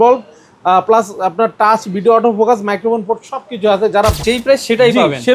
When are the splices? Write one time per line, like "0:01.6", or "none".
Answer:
0:04.2